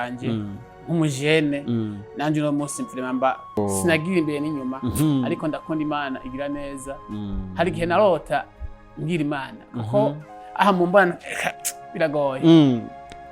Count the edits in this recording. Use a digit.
1